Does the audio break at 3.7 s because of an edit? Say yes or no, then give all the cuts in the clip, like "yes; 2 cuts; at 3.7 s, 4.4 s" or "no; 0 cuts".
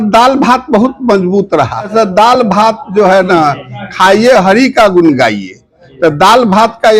no; 1 cut; at 1.9 s